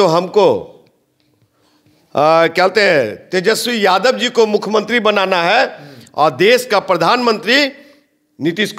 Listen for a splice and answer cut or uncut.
uncut